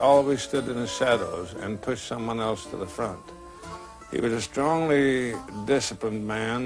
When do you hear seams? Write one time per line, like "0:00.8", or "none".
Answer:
none